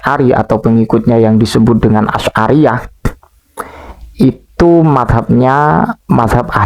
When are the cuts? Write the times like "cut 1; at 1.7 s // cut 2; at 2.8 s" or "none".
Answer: none